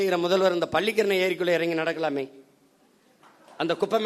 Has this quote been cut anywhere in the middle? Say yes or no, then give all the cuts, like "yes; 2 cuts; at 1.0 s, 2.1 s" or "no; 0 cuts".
no; 0 cuts